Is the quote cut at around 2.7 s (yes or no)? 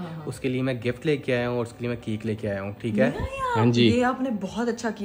no